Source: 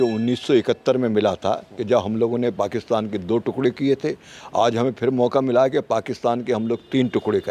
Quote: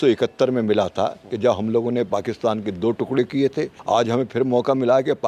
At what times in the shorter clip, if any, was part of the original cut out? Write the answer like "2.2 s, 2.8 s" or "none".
3.8 s